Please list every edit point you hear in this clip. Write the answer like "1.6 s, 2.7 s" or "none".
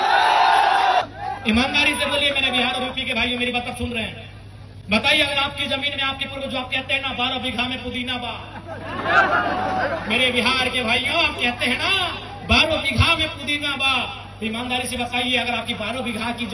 1.0 s